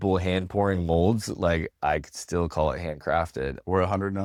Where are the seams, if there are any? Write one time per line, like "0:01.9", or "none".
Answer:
none